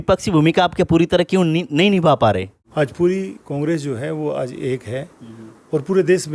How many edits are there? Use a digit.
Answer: 1